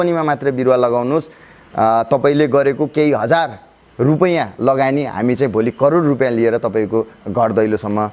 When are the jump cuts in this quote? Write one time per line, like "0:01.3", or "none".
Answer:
0:07.2